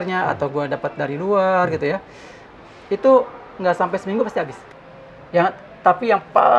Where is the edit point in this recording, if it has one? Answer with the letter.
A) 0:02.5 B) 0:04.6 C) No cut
B